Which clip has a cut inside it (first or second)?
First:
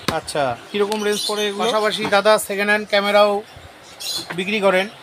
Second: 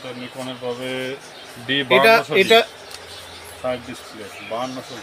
first